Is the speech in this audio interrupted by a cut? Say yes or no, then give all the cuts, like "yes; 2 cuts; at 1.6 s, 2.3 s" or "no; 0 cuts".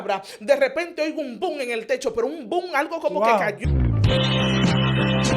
yes; 1 cut; at 3.6 s